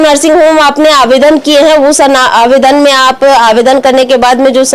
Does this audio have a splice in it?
no; 0 cuts

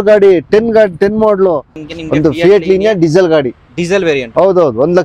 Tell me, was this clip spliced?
yes; 1 cut; at 1.8 s

